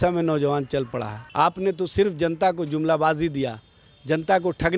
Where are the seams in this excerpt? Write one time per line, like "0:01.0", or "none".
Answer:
0:01.2